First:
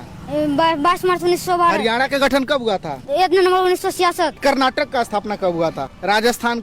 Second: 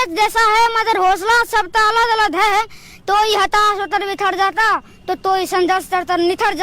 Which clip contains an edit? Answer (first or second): first